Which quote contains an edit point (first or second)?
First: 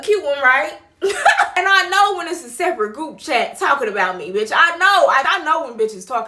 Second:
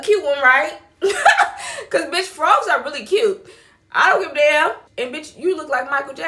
first